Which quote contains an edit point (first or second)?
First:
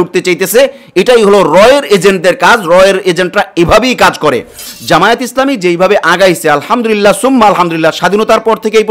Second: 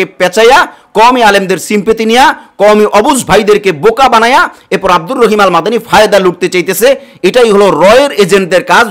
first